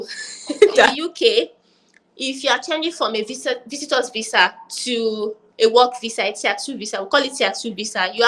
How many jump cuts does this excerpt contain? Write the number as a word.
one